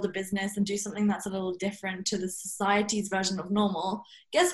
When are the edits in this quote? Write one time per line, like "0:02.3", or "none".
none